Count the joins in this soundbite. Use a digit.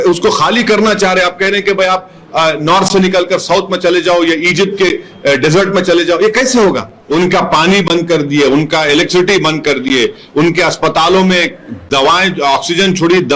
1